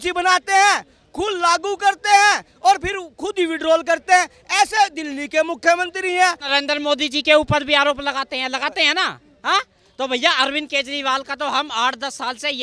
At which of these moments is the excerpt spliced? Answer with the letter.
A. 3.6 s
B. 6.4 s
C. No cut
B